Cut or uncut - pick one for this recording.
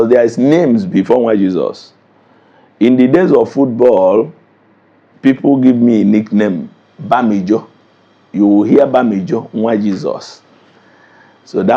uncut